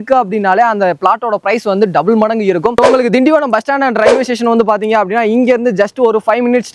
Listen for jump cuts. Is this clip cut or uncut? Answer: cut